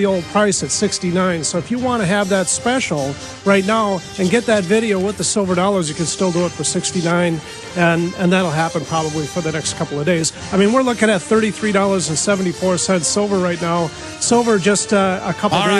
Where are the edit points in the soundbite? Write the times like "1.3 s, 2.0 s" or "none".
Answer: none

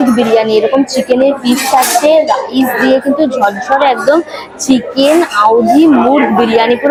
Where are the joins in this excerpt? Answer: none

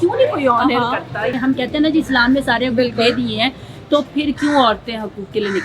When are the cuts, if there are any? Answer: 1.3 s

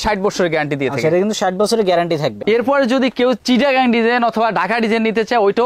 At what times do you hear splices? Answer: 2.4 s

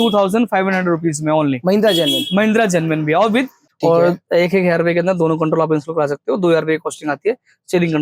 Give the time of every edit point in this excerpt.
3.6 s

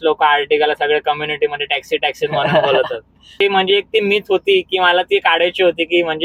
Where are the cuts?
3.4 s

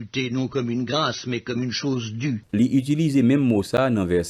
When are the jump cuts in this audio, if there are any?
none

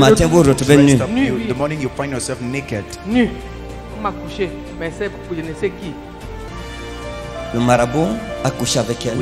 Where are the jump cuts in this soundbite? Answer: 6.5 s

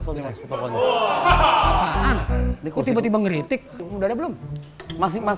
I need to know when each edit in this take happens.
3.8 s

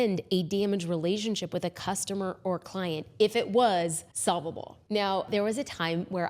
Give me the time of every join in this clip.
4.1 s

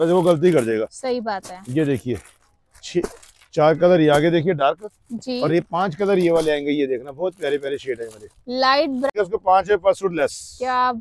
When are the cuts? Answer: 9.1 s

